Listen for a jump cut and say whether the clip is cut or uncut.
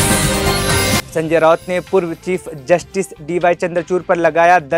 uncut